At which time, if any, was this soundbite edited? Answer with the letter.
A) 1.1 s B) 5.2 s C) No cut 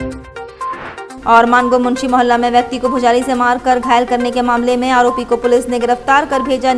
A